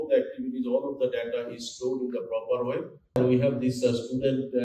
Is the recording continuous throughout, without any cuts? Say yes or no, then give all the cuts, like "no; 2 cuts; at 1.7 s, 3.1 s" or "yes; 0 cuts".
no; 1 cut; at 3.2 s